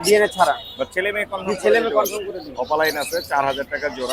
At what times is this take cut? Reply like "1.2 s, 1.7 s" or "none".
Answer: none